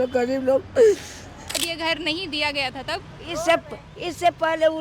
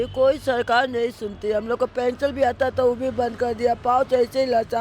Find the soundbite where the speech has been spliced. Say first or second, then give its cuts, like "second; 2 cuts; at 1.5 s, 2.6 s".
first; 1 cut; at 1.6 s